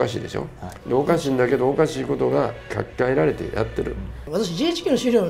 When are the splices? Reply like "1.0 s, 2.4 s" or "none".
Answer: 2.7 s, 4.2 s

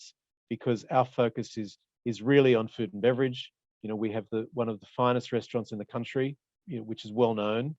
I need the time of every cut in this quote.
6.5 s

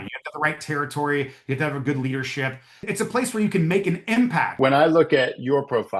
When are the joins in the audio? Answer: 2.8 s, 4.5 s

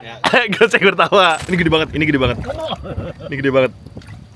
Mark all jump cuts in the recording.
1.4 s

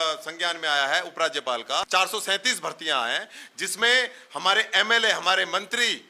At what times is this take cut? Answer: 1.9 s

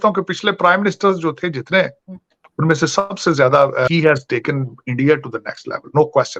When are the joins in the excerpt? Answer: 3.9 s

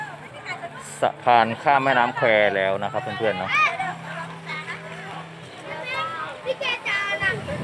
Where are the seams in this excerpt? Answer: none

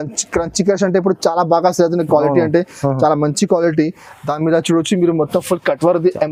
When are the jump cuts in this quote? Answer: none

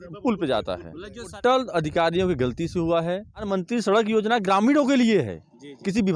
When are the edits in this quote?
1.3 s, 3.5 s

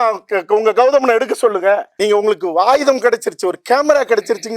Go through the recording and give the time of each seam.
1.9 s

